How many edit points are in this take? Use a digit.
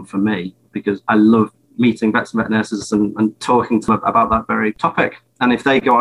3